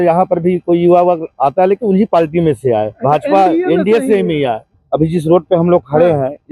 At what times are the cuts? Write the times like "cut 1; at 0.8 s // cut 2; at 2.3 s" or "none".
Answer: cut 1; at 4.8 s